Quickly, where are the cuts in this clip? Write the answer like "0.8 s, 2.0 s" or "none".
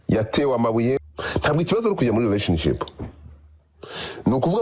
1.0 s